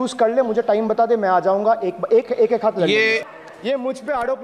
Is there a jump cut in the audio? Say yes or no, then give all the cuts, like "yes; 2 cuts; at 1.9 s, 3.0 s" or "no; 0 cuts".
yes; 1 cut; at 3.3 s